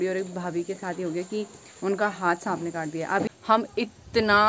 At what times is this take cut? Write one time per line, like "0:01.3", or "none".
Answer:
0:03.3